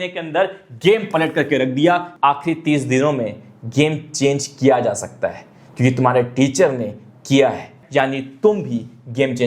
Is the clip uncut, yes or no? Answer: no